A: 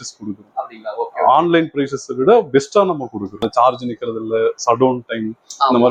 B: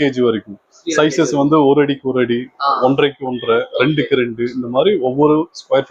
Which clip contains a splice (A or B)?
A